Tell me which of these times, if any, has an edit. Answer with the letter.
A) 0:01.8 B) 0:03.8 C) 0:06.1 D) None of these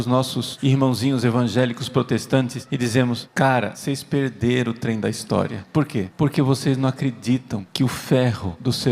A